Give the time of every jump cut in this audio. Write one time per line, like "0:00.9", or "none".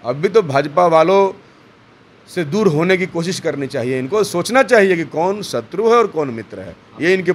none